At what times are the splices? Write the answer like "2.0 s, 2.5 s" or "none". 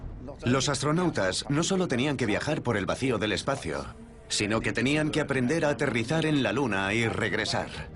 3.1 s